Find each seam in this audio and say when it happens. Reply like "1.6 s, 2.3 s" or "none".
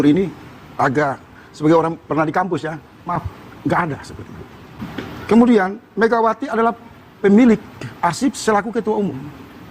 5.2 s